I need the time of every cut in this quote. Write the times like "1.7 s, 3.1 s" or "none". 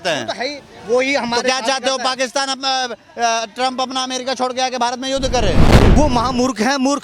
5.8 s